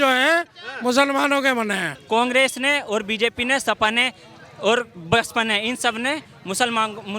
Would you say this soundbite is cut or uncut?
cut